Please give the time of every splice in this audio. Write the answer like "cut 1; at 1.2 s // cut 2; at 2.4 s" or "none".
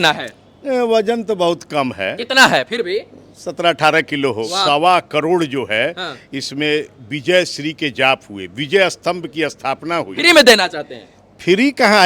cut 1; at 4.4 s // cut 2; at 10.1 s